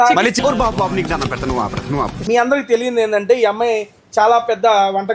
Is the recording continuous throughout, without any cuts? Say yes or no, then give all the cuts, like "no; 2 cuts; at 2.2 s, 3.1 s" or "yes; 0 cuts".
no; 1 cut; at 2.2 s